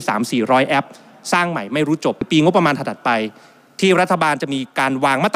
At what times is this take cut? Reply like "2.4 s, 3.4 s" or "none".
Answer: 2.3 s